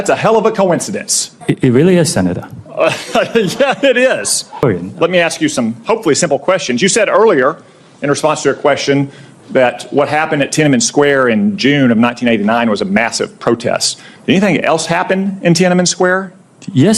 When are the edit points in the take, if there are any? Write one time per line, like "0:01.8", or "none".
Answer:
0:04.6